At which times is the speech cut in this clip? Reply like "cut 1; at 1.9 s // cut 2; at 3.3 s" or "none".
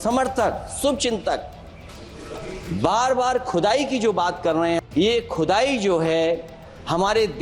cut 1; at 4.8 s

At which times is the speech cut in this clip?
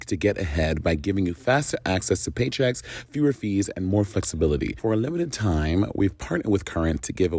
cut 1; at 4.7 s

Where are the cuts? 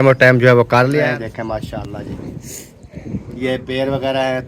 cut 1; at 1.0 s

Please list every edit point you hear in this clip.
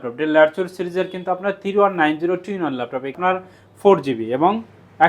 cut 1; at 3.2 s

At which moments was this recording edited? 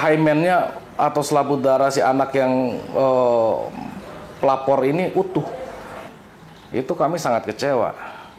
cut 1; at 6.0 s

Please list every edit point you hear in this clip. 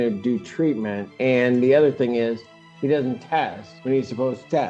cut 1; at 1.0 s // cut 2; at 3.7 s

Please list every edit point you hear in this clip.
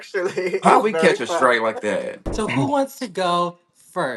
cut 1; at 2.2 s

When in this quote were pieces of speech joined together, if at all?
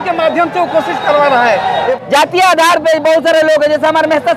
cut 1; at 1.9 s

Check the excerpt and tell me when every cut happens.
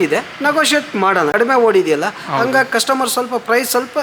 cut 1; at 1.3 s

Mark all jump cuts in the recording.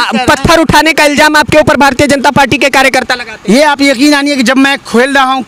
none

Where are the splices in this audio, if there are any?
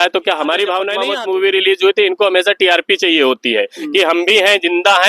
cut 1; at 1.0 s

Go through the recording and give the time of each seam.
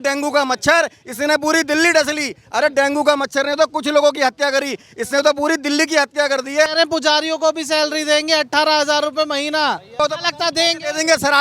cut 1; at 6.7 s // cut 2; at 10.0 s

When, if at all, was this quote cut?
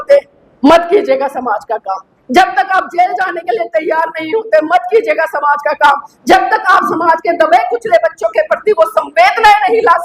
none

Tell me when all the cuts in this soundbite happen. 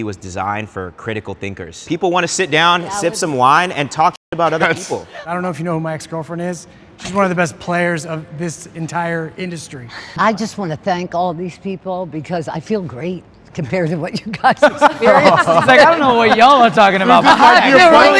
cut 1; at 1.7 s // cut 2; at 5.2 s // cut 3; at 10.0 s

